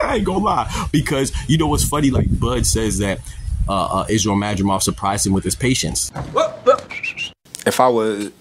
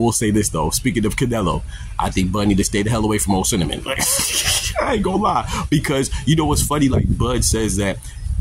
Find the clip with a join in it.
first; 1 cut; at 6.2 s

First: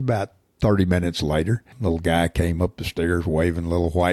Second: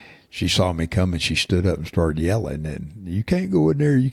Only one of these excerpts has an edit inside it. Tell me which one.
first; 1 cut; at 1.7 s

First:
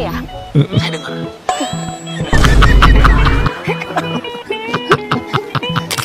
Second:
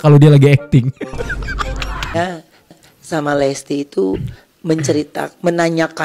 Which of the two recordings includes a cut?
second; 1 cut; at 2.2 s

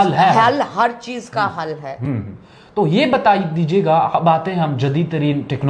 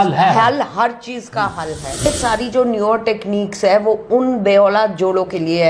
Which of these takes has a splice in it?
second; 1 cut; at 2.1 s

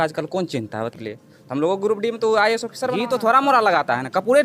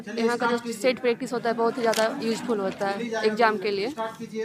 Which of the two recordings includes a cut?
first; 2 cuts; at 0.9 s, 2.9 s

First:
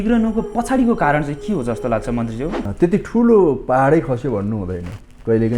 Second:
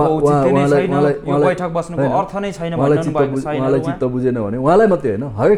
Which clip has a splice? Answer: first; 1 cut; at 2.6 s

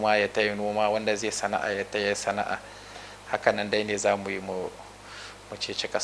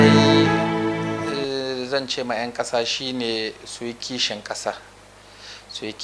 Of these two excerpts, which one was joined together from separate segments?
second; 1 cut; at 0.9 s

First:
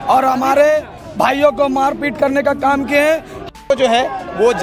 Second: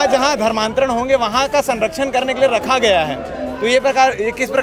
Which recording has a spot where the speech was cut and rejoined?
first; 1 cut; at 3.5 s

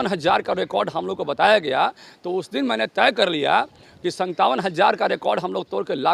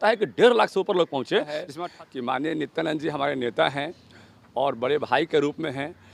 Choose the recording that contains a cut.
second; 1 cut; at 1.7 s

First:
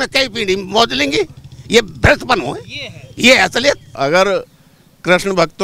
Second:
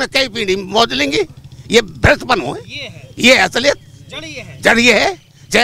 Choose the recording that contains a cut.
first; 1 cut; at 3.9 s

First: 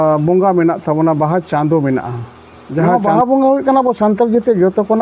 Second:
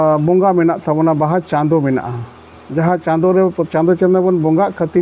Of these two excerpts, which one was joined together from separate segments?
first; 1 cut; at 2.9 s

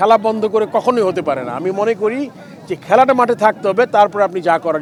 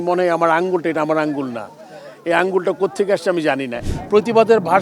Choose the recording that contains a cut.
second; 1 cut; at 3.8 s

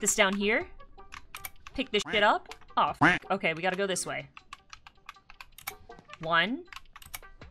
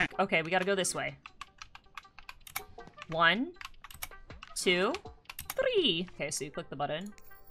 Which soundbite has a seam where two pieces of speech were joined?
second; 1 cut; at 6.1 s

